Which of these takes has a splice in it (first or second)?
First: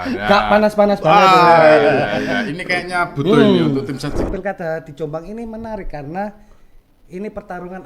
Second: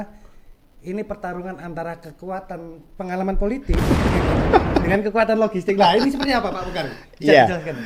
first